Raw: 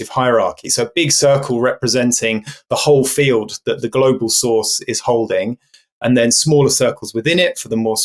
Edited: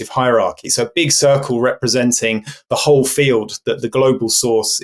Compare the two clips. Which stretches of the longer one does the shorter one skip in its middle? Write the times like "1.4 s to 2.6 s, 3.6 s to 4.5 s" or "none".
none